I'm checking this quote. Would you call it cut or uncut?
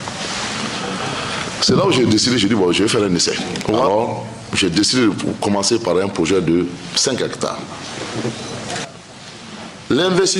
cut